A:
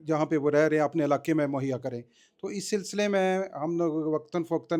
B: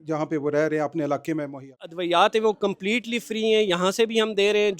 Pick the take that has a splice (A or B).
B